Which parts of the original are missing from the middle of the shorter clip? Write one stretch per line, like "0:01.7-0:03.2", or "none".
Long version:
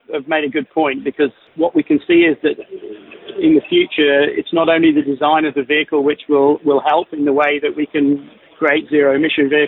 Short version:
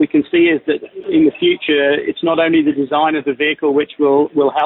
0:02.7-0:03.2